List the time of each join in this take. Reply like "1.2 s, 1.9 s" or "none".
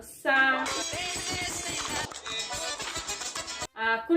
2.3 s